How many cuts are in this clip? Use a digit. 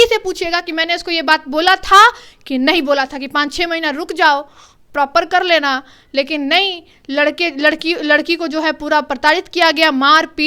0